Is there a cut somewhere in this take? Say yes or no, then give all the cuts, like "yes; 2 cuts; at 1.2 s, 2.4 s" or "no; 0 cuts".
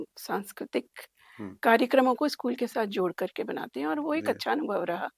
no; 0 cuts